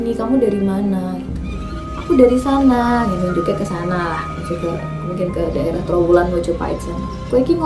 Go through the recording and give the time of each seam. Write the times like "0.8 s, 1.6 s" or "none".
none